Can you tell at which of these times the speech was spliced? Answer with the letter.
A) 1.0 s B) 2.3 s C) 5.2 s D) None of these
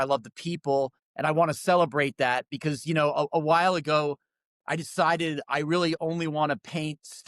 A